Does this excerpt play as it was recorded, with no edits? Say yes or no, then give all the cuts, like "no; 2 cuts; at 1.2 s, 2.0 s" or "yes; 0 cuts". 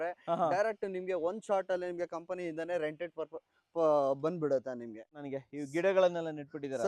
no; 1 cut; at 5.2 s